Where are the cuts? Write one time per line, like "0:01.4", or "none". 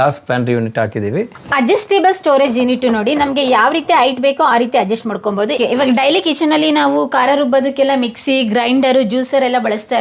0:01.4
0:05.6